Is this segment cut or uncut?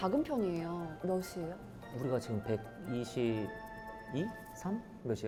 uncut